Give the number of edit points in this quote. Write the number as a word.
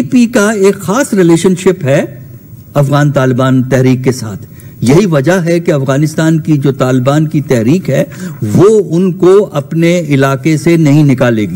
zero